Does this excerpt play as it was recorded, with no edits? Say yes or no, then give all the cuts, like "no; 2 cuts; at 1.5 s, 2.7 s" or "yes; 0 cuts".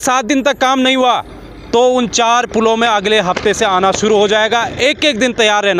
yes; 0 cuts